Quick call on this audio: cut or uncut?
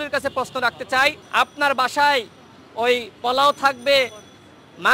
cut